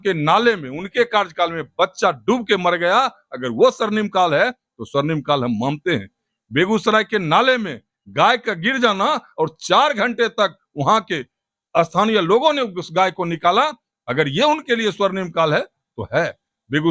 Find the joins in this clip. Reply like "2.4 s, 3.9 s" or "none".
none